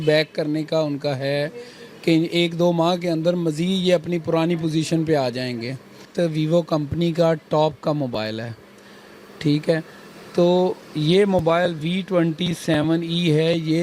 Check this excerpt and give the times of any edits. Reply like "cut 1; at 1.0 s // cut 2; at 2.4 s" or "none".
cut 1; at 6.1 s